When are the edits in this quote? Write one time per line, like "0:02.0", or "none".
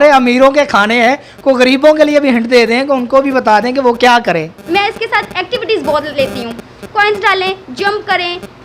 0:04.6